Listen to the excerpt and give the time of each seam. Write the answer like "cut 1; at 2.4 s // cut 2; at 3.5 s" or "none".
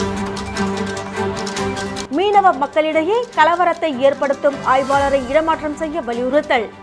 cut 1; at 1.9 s